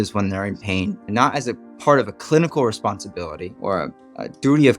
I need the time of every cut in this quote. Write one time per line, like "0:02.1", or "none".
0:03.5

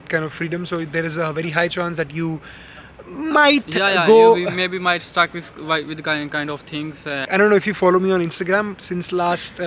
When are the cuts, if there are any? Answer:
none

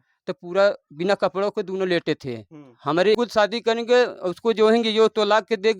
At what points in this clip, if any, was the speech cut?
0:03.2

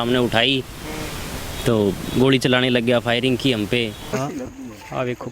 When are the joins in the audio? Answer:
0:04.1

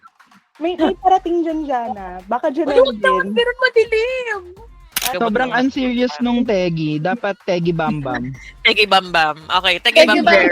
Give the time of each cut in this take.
0:05.1

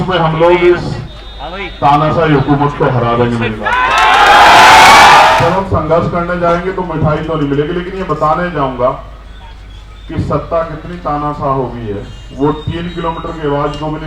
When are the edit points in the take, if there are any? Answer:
0:05.3

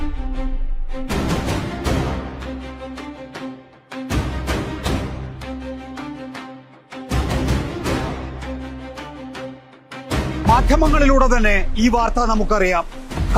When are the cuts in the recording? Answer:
none

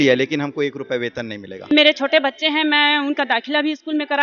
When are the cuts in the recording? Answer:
0:01.7

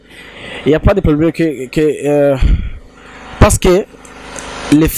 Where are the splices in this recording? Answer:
none

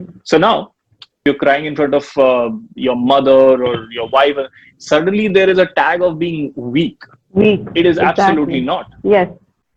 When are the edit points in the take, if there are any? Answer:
0:01.2

